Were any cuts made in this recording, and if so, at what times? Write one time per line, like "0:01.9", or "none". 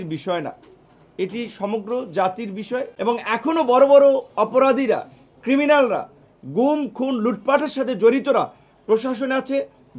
0:02.9